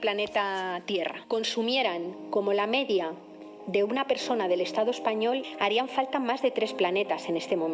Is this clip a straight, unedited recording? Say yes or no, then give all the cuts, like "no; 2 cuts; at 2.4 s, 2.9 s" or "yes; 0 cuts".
no; 2 cuts; at 1.2 s, 5.5 s